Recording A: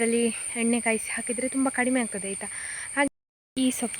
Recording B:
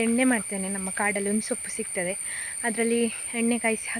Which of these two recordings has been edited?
A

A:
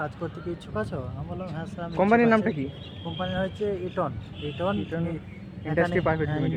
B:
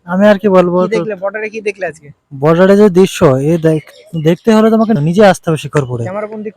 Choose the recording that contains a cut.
B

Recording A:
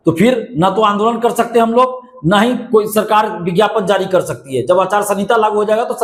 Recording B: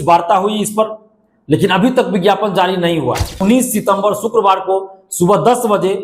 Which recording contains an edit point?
B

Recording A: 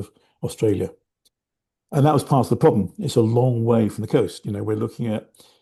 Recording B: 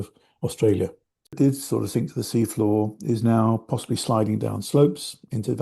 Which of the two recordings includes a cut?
B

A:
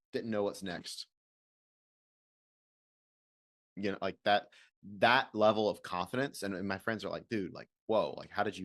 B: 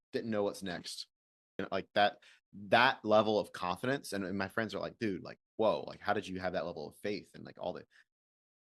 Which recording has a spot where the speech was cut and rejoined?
B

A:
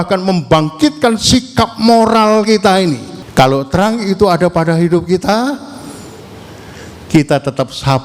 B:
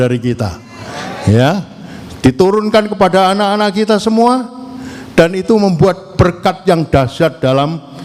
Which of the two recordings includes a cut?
A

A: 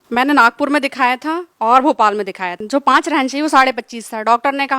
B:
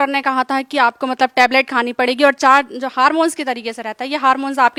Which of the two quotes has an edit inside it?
A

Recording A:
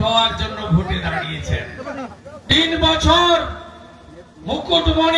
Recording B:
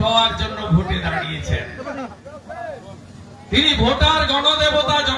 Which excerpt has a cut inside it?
A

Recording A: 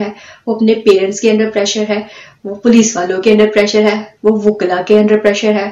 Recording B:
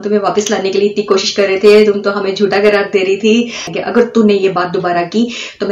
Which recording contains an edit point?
B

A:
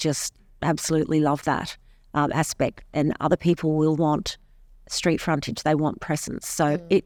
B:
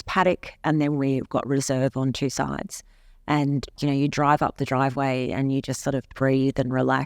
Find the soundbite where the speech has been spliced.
B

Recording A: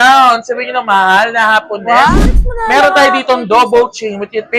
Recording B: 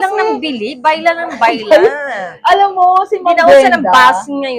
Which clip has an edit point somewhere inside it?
A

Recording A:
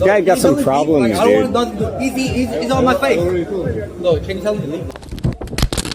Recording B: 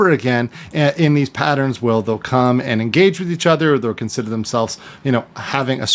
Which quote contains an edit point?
A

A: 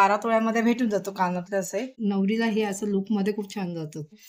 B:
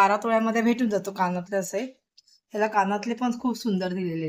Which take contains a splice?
A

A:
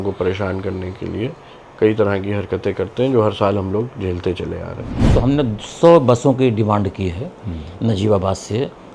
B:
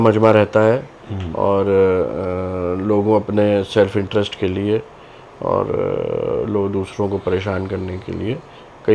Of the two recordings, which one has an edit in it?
A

